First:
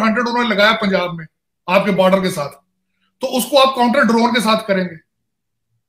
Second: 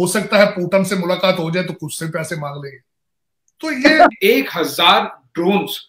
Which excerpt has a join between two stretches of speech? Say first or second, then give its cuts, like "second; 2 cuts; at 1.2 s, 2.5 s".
second; 1 cut; at 4.2 s